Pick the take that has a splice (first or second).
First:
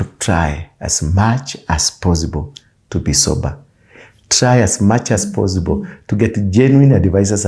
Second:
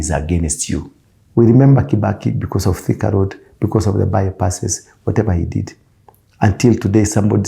second